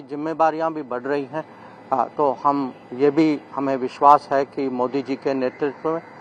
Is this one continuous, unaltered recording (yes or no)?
yes